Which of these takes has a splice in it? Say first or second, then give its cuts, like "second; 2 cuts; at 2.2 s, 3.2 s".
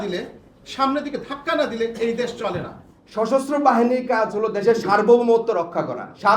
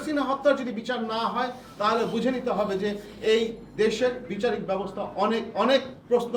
first; 1 cut; at 2.9 s